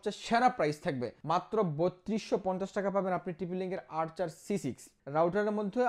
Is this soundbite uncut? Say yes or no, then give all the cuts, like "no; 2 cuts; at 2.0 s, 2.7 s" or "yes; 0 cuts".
no; 2 cuts; at 1.1 s, 4.9 s